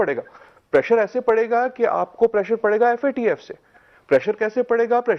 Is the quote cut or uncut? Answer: uncut